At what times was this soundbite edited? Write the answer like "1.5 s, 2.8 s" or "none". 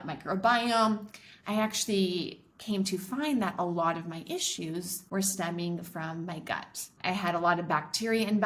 none